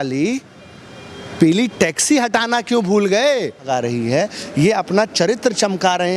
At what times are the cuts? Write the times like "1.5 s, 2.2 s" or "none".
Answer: 3.7 s